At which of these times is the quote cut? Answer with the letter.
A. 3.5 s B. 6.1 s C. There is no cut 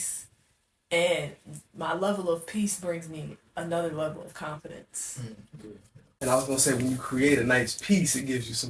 B